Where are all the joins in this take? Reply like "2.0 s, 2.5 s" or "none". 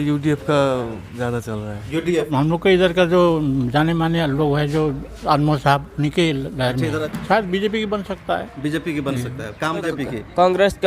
2.3 s, 7.0 s, 9.8 s